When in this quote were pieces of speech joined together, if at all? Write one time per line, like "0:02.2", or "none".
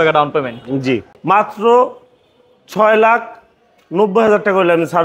0:01.1